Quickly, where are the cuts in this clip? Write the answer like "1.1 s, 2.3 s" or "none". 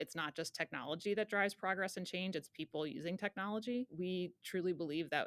3.9 s